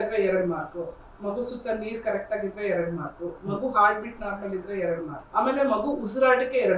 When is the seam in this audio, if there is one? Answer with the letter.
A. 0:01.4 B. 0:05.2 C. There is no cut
B